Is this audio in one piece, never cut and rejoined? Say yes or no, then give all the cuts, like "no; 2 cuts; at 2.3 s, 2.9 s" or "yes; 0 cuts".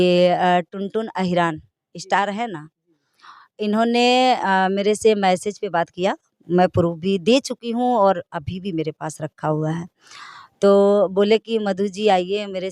yes; 0 cuts